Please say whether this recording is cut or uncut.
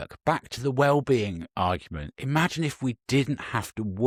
uncut